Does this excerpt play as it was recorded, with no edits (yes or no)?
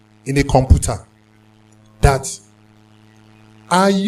yes